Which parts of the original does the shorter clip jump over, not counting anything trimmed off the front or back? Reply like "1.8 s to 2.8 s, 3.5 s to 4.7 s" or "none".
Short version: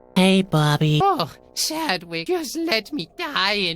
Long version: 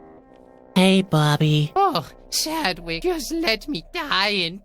1.6 s to 1.7 s